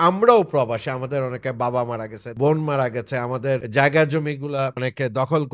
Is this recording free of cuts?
no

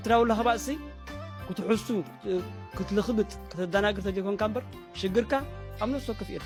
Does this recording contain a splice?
no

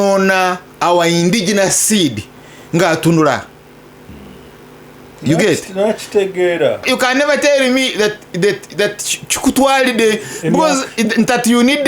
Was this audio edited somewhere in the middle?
yes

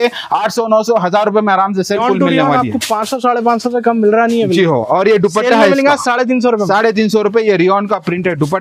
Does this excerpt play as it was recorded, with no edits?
no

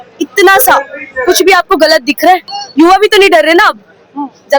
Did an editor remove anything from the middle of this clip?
yes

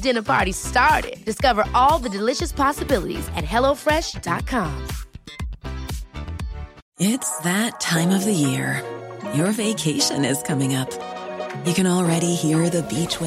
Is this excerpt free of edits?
no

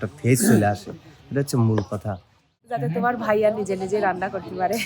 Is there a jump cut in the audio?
yes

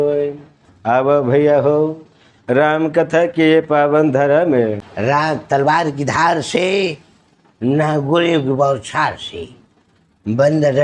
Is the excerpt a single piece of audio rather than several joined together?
no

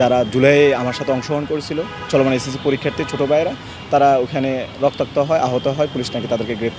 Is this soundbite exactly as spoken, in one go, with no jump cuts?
yes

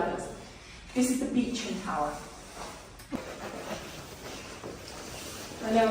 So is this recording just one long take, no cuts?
no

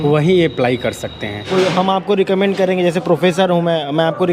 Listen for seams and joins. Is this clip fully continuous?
no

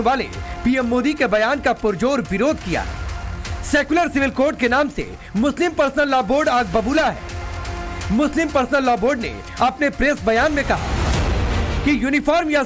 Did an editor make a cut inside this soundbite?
no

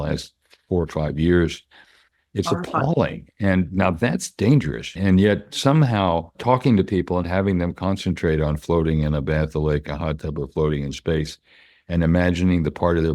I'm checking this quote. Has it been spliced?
yes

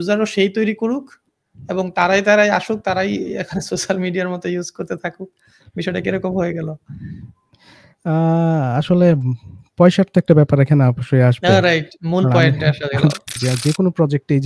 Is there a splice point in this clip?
yes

